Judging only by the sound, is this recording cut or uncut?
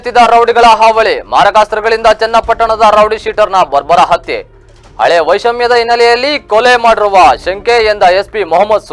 uncut